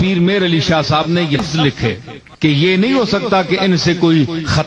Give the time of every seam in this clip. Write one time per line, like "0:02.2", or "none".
0:01.4